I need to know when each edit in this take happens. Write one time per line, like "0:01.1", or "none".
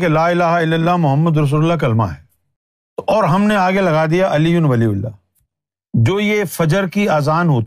0:03.1
0:06.1